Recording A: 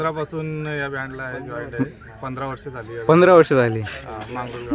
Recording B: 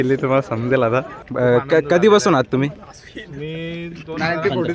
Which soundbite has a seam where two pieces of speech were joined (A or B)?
B